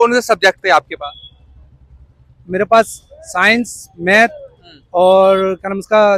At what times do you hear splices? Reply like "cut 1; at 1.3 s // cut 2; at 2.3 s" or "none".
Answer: none